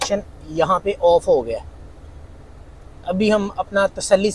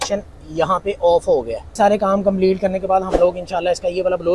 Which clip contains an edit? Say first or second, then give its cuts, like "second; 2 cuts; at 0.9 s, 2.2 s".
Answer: second; 1 cut; at 1.6 s